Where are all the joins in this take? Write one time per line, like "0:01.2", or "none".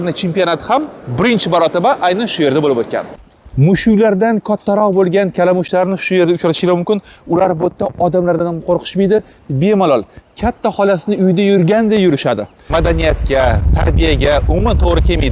0:03.2
0:12.7

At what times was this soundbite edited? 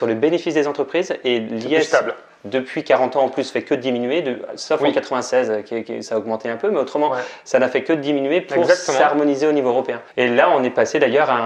none

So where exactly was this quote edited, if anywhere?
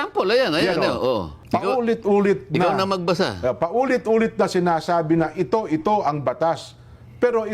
0:01.3

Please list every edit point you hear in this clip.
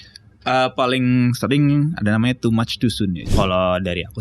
0:03.2

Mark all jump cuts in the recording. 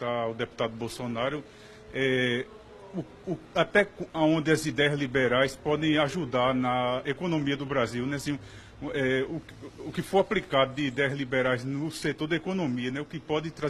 0:10.5

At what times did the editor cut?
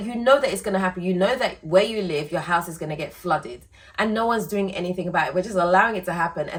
none

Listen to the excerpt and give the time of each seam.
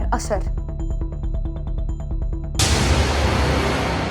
0:02.4

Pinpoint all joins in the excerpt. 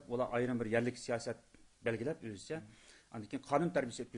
0:01.0

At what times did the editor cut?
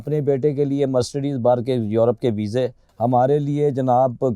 0:02.8

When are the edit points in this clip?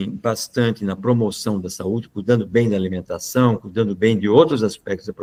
none

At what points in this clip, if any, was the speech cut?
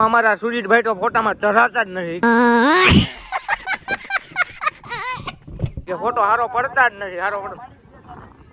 none

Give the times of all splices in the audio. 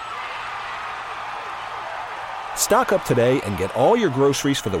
none

